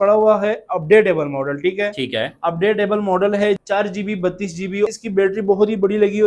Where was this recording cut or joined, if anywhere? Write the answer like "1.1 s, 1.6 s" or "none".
3.6 s, 4.9 s